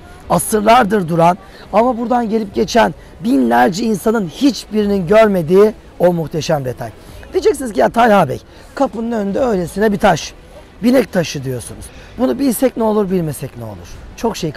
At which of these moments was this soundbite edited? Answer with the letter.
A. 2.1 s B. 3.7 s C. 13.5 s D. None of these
D